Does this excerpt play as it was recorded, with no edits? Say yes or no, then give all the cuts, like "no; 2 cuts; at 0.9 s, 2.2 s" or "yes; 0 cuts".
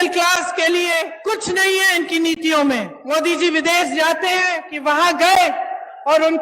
no; 3 cuts; at 1.1 s, 2.9 s, 4.6 s